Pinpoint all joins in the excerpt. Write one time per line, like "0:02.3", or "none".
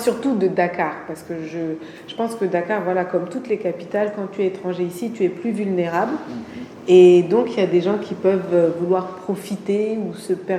none

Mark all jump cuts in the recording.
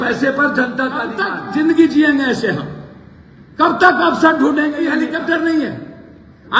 0:01.4
0:04.9

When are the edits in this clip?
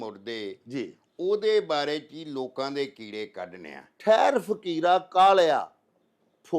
0:04.0

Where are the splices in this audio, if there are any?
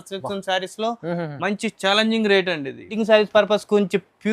0:02.9

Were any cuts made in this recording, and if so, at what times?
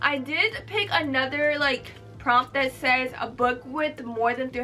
none

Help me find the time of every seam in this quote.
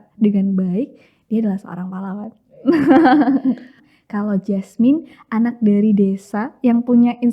0:03.9

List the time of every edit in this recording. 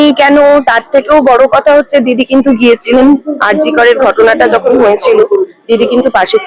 none

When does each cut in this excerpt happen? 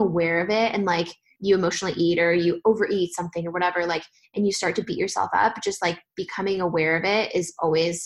0:01.3

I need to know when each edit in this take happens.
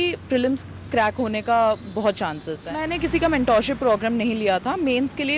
0:02.9

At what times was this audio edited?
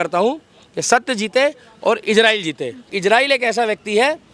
0:02.9

